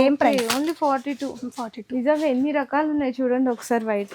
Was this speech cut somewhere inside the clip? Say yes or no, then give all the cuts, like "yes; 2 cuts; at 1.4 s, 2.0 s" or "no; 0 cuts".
no; 0 cuts